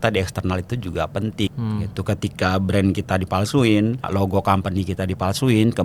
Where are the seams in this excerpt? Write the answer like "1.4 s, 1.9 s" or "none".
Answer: 1.5 s, 4.1 s